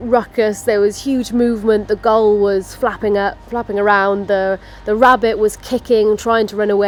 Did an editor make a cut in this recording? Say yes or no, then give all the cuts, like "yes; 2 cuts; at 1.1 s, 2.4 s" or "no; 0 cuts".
no; 0 cuts